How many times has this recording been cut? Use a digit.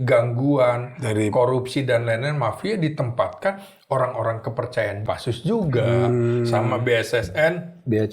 1